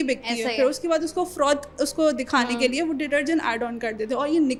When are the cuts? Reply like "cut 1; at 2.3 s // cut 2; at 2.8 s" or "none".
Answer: none